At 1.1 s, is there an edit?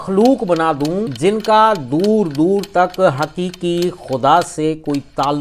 yes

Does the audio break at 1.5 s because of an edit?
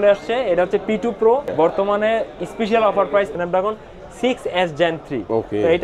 yes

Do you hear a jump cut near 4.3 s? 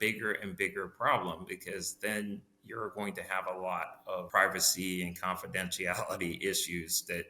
yes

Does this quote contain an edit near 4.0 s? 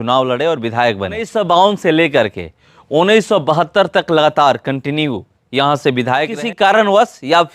no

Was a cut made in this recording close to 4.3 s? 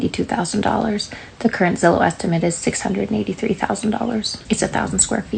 yes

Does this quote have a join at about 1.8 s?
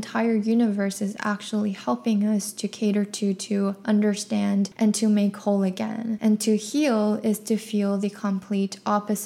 no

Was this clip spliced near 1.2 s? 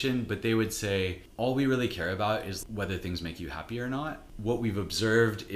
yes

